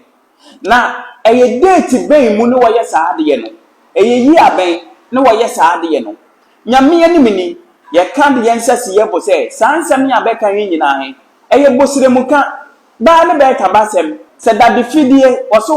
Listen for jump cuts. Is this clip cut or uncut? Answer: cut